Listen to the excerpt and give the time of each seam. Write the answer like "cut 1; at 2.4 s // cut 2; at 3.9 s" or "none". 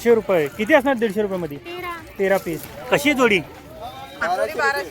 cut 1; at 2.7 s